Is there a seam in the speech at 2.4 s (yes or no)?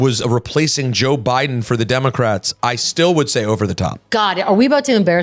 no